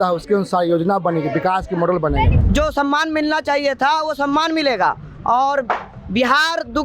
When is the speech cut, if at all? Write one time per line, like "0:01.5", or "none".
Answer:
0:02.4